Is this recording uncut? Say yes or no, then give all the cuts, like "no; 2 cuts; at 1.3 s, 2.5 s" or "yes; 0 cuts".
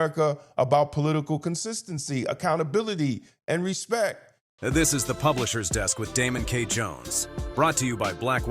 no; 1 cut; at 4.5 s